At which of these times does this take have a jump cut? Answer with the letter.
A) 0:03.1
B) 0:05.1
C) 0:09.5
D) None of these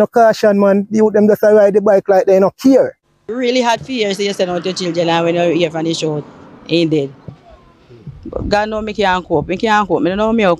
A